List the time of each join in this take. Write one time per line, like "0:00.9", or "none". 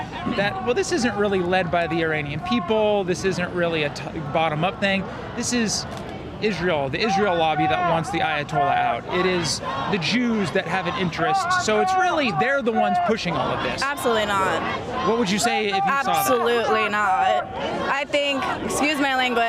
none